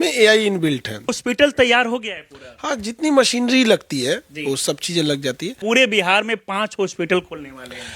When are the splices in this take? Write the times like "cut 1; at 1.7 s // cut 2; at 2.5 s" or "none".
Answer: cut 1; at 1.2 s // cut 2; at 5.6 s